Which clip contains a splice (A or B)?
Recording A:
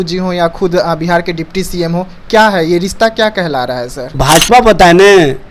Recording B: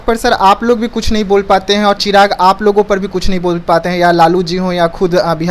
A